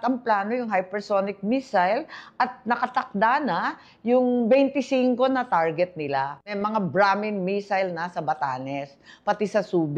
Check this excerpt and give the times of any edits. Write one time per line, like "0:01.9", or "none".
0:06.6